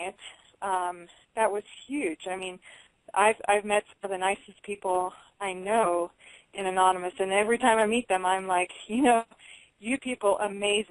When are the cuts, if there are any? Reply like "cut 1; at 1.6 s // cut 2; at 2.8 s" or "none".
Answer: cut 1; at 6.2 s